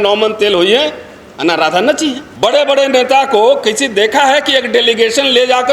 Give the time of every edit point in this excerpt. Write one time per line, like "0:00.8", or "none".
0:02.2